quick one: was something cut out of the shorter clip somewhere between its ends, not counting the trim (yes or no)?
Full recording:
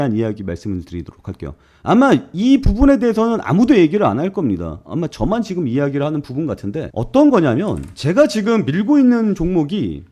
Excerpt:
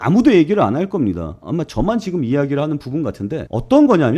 no